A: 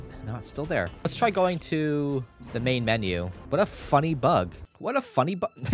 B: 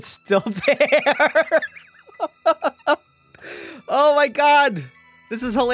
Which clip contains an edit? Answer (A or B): A